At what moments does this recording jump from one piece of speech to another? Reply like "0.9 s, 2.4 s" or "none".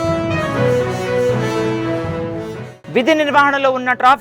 2.7 s